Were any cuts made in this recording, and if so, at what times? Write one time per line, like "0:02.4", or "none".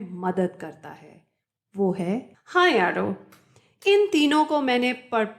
0:02.3